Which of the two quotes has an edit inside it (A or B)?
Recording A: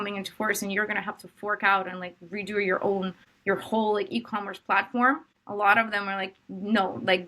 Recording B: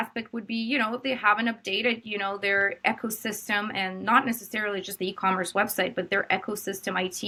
A